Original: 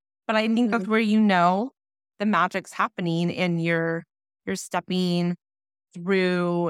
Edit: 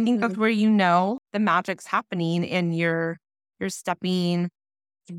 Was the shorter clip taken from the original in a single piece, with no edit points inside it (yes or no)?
no